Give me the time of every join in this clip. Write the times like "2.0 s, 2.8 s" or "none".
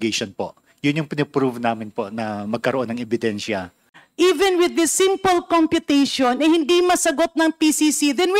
3.8 s

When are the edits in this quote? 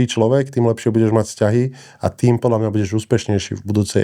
none

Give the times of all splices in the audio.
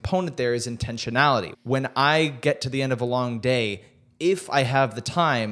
1.5 s

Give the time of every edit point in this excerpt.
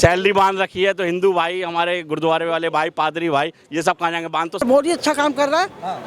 4.6 s

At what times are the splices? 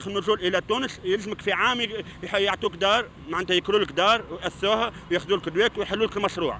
none

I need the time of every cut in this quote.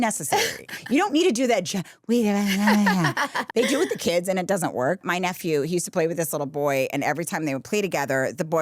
3.4 s, 5.0 s

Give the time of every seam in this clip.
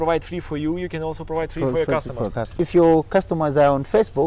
2.5 s

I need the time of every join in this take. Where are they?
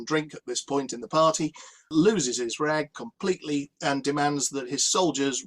1.9 s

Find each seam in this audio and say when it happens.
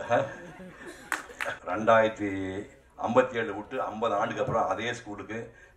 1.6 s

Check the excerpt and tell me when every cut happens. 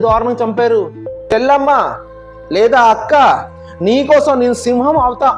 1.1 s

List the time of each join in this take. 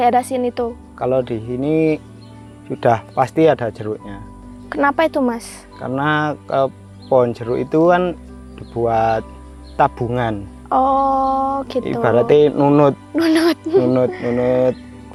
none

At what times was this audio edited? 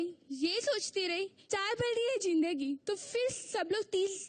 1.4 s

